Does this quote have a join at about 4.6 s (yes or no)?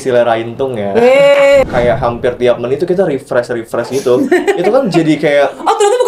no